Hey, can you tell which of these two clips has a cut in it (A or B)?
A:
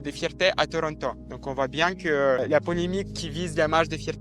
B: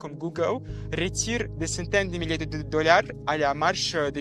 A